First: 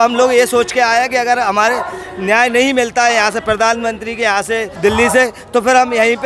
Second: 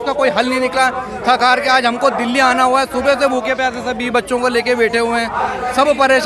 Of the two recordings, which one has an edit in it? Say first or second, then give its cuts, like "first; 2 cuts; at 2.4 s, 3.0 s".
first; 1 cut; at 4.7 s